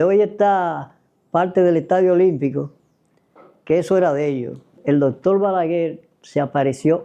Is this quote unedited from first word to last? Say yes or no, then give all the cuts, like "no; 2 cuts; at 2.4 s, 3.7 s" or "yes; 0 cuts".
no; 1 cut; at 4.8 s